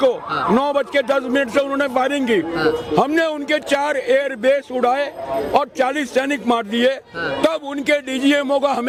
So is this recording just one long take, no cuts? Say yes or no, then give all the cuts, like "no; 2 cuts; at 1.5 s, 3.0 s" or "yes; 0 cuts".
yes; 0 cuts